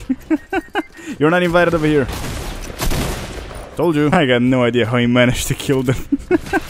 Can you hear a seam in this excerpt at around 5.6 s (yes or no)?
no